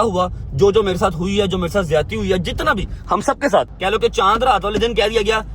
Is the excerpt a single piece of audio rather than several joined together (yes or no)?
no